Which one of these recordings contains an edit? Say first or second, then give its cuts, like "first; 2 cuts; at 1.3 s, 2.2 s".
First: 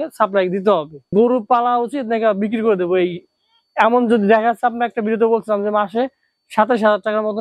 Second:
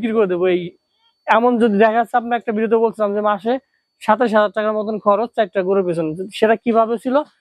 first; 1 cut; at 1.0 s